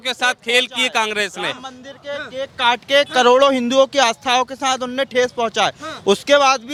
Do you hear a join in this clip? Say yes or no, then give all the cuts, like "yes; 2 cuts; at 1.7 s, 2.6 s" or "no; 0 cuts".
no; 0 cuts